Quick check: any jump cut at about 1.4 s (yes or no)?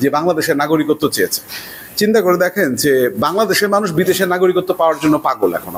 no